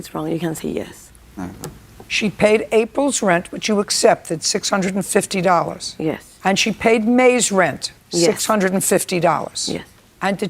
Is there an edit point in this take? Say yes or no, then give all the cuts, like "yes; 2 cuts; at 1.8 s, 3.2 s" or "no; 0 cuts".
yes; 1 cut; at 2.3 s